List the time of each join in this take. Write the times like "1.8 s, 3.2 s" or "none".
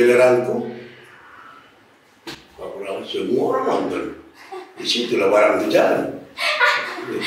none